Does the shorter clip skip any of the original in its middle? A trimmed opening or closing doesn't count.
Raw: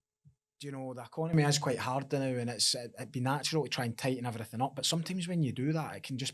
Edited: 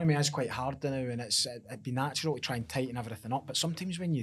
no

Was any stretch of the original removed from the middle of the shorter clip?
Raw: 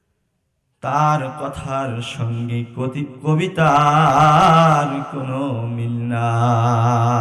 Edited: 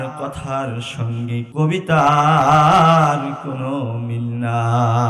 yes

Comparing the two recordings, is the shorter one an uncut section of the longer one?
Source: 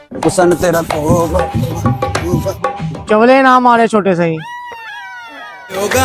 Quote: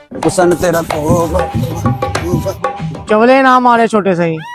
yes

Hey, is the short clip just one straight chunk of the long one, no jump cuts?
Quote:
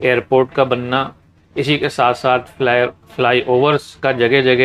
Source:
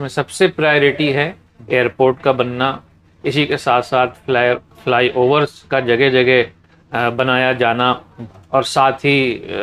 yes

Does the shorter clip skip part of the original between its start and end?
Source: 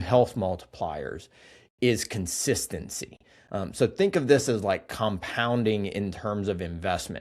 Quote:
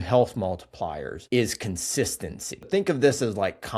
yes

